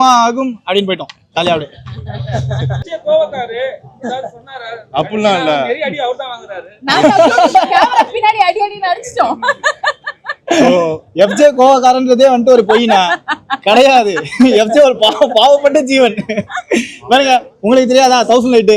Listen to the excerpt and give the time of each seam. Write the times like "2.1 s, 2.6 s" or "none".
2.8 s